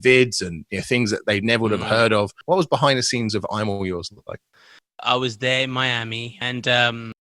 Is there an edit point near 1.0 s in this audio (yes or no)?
no